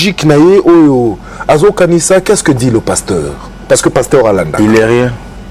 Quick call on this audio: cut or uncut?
uncut